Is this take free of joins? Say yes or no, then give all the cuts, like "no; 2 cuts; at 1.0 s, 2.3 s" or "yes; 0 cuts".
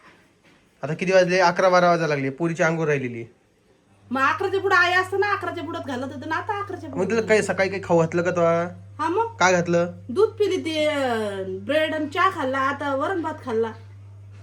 yes; 0 cuts